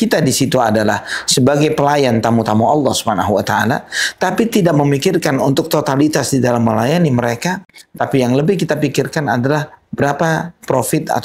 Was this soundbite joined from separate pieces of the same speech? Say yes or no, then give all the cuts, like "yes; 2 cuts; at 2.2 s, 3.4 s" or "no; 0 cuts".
no; 0 cuts